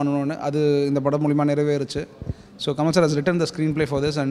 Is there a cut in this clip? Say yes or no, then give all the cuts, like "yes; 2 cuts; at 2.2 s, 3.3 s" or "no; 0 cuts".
no; 0 cuts